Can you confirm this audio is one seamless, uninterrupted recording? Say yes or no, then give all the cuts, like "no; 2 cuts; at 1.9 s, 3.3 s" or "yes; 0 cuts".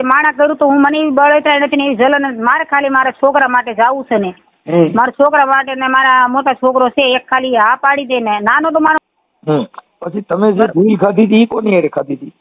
no; 1 cut; at 9.0 s